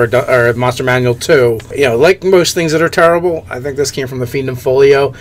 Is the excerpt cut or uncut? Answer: cut